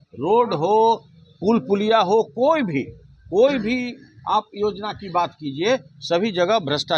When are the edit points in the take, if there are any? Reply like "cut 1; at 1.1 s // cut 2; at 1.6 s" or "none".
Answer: none